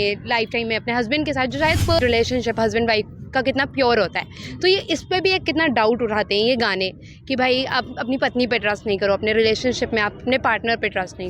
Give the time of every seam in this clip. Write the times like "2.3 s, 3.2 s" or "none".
2.0 s